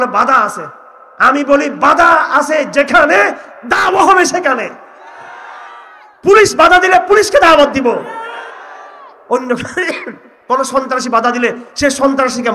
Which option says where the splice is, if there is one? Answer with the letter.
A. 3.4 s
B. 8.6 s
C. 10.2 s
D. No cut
D